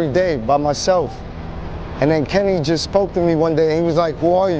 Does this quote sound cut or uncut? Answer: cut